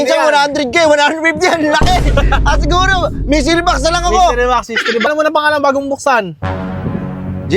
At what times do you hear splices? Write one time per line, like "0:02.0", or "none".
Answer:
0:05.1